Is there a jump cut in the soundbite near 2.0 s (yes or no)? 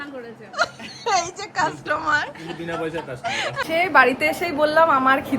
no